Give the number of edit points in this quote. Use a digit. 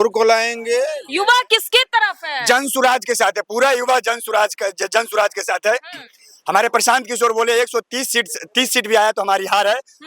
1